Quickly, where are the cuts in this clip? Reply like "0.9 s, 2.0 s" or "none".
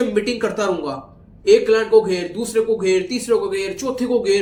none